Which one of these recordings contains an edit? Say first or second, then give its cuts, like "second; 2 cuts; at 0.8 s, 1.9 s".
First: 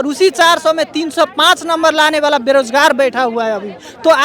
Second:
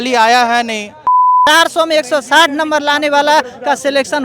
second; 1 cut; at 1.4 s